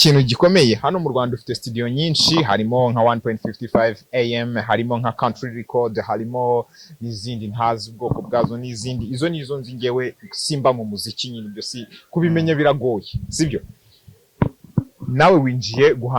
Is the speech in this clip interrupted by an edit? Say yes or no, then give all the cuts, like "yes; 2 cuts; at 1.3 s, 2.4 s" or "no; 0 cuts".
no; 0 cuts